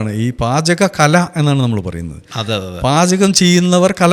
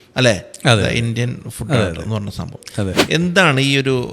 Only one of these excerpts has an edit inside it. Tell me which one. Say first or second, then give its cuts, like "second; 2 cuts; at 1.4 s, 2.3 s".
second; 1 cut; at 3.0 s